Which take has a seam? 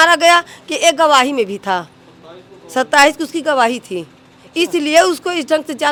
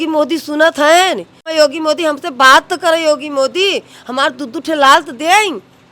second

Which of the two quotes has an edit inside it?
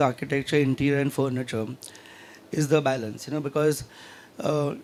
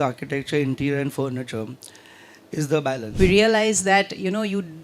second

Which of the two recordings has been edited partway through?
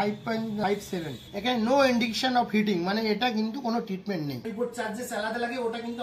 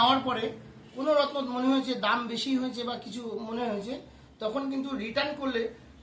first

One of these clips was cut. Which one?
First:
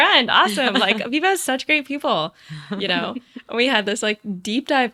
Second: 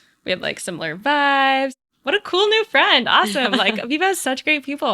second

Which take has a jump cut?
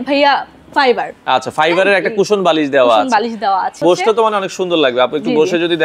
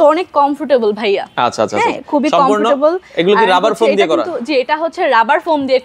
first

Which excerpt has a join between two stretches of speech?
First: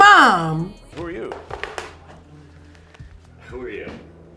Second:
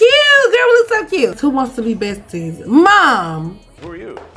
second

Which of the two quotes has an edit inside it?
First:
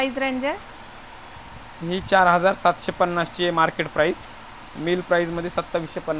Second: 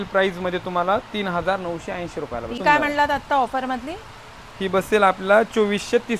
second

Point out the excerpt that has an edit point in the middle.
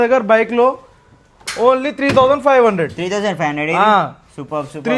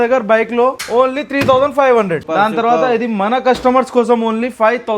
second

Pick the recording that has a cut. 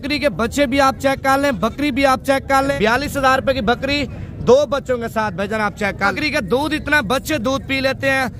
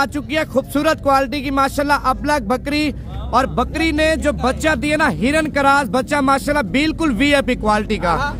first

